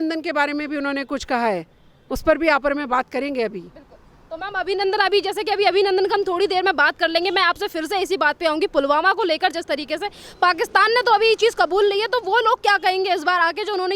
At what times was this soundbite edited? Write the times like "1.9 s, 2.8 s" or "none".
none